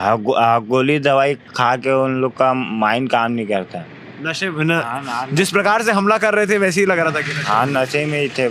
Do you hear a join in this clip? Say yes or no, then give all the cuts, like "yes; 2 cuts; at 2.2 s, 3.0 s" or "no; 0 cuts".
no; 0 cuts